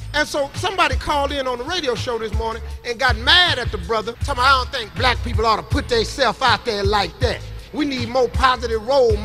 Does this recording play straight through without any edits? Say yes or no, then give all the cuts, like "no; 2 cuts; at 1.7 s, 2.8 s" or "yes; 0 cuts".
no; 1 cut; at 4.2 s